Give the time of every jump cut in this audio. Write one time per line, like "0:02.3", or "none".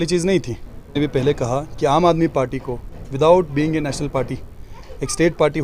0:00.9

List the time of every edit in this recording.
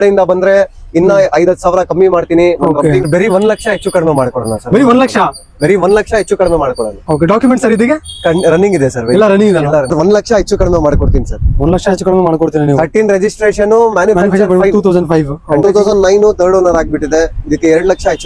0:03.1
0:09.9
0:15.6

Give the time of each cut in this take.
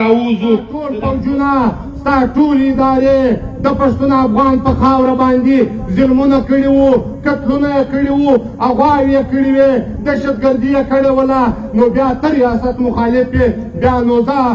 0:00.9

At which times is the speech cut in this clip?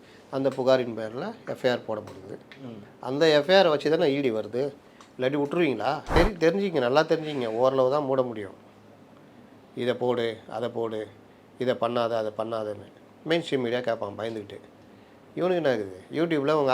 0:06.2

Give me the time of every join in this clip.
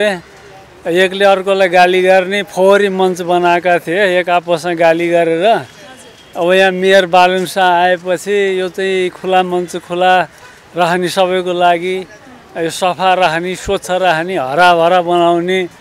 none

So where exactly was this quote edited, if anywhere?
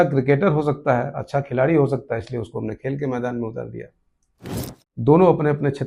0:04.4

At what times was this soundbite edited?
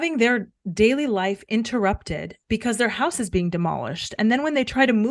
none

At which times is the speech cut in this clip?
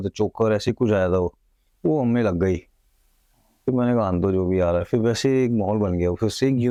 none

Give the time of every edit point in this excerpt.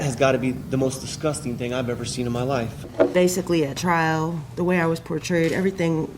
0:02.8

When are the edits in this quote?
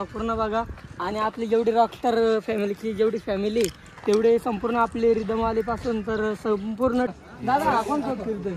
0:07.1

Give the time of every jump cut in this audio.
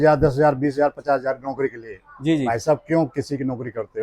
none

